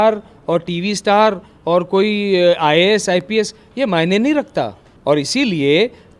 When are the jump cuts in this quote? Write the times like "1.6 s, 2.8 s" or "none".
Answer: 4.9 s